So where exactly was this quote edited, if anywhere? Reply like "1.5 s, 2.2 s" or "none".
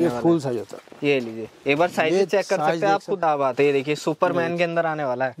3.2 s